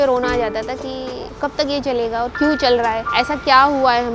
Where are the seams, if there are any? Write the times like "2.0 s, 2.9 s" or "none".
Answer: 1.2 s, 3.0 s